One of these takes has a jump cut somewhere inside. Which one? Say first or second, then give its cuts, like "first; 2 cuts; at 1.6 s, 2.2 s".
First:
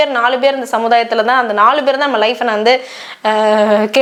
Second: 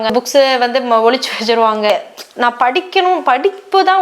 second; 1 cut; at 1.9 s